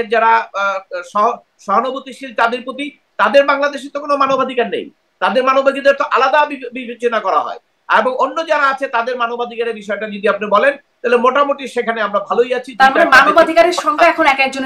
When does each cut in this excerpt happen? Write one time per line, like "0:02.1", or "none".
none